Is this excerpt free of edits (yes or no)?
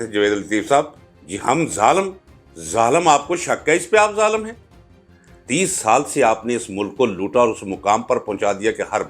yes